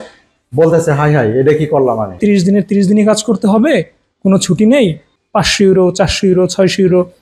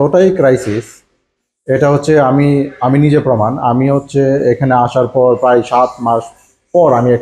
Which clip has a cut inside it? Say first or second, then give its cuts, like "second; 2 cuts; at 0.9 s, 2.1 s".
first; 2 cuts; at 2.2 s, 5.1 s